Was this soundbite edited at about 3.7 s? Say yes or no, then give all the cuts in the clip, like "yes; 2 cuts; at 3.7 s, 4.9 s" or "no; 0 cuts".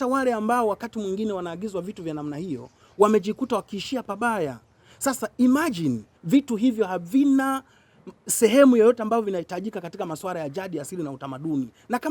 no; 1 cut; at 6.1 s